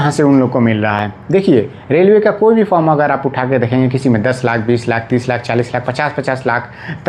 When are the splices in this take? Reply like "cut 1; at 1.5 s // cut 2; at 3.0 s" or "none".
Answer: none